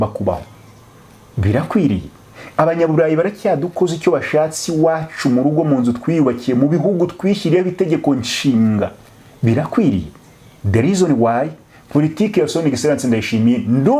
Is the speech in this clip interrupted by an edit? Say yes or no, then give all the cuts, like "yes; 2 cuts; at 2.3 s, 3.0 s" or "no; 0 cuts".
no; 0 cuts